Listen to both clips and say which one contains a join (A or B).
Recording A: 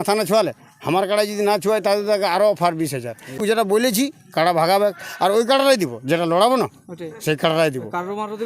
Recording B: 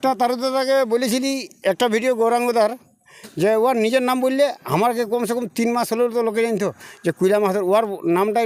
A